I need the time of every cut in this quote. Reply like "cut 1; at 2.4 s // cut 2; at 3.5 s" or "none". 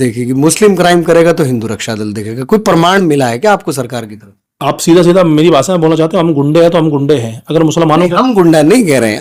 none